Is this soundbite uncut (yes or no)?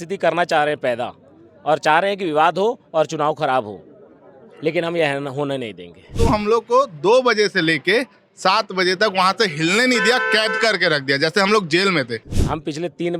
no